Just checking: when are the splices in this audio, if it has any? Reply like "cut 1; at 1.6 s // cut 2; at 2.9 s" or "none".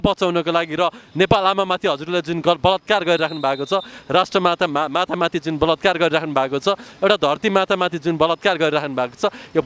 none